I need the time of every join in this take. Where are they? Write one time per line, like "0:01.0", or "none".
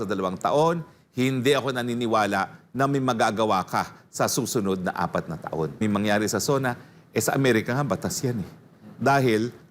0:05.8